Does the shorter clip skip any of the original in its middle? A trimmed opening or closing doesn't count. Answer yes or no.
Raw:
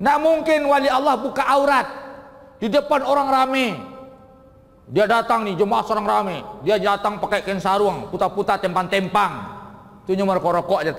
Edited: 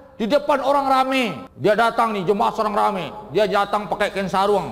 yes